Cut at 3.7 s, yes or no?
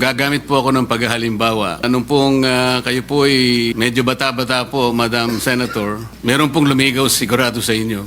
yes